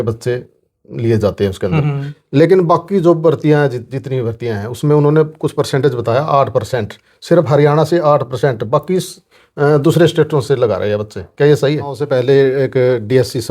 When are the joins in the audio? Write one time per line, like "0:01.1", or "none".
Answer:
0:12.0